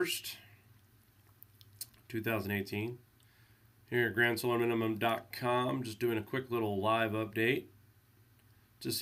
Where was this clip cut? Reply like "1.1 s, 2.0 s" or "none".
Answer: none